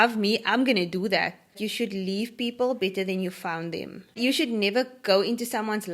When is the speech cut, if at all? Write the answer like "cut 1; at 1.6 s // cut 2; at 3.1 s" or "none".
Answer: cut 1; at 1.6 s // cut 2; at 4.2 s

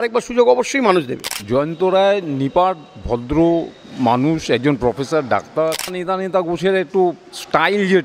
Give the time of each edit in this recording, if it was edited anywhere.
cut 1; at 1.3 s // cut 2; at 6.0 s

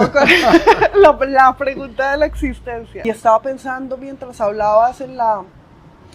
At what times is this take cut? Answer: cut 1; at 2.9 s

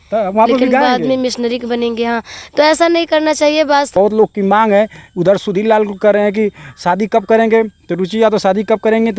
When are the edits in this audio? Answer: cut 1; at 3.9 s

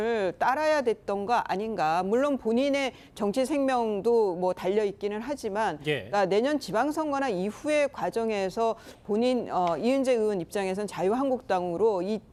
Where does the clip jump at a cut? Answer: none

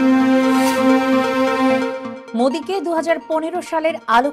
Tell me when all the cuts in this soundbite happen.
none

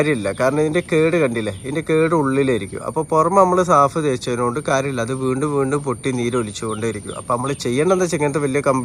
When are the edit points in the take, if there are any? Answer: none

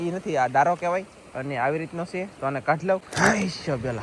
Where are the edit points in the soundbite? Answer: cut 1; at 3.1 s

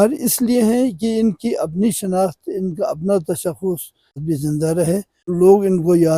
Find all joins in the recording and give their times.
cut 1; at 4.1 s // cut 2; at 5.2 s

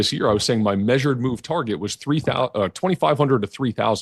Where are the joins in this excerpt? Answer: none

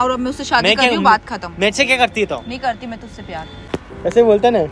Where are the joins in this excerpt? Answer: cut 1; at 3.5 s

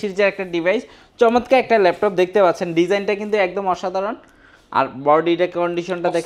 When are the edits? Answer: none

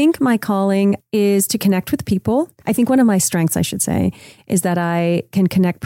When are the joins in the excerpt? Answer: cut 1; at 1.0 s // cut 2; at 2.6 s

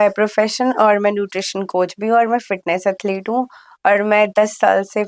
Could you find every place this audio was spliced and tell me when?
none

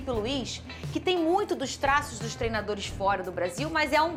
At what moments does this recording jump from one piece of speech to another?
none

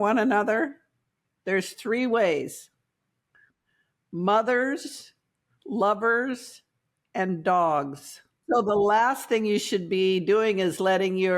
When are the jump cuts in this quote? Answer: cut 1; at 8.3 s

